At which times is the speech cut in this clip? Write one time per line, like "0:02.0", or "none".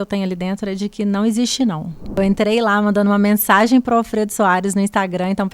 0:02.2